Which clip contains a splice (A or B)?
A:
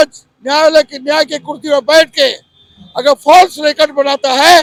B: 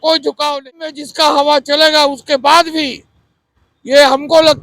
B